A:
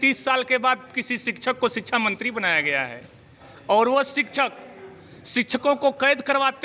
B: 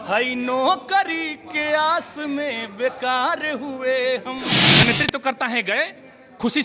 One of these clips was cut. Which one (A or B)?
B